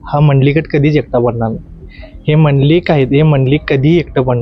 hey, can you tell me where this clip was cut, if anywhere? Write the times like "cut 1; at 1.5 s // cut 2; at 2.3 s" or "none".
none